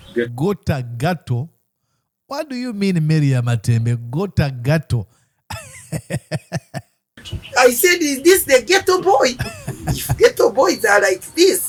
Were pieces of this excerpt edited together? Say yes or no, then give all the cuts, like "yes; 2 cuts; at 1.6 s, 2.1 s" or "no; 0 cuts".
no; 0 cuts